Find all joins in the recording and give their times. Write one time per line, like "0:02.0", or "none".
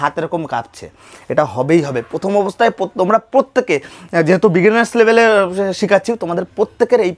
none